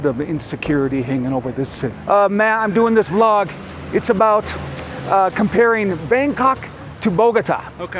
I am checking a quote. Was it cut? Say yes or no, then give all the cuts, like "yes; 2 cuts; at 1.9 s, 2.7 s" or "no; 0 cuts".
yes; 1 cut; at 1.9 s